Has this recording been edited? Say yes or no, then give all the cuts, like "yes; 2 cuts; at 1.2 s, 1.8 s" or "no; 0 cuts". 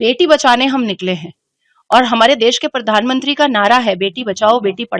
no; 0 cuts